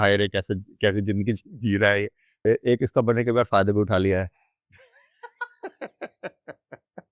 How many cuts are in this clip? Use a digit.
1